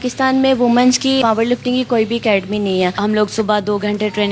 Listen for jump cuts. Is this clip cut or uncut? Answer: cut